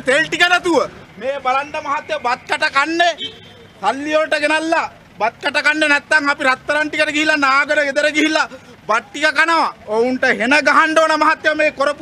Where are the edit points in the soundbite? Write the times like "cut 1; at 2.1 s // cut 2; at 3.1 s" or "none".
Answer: cut 1; at 1.0 s // cut 2; at 9.8 s